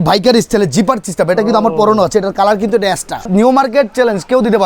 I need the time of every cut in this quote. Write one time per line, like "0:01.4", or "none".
0:03.2